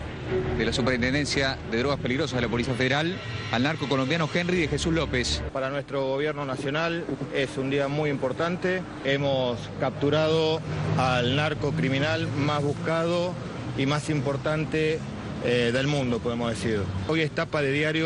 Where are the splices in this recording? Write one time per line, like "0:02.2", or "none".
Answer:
0:05.5
0:17.1